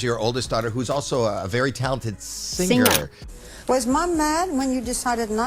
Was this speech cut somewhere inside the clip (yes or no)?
yes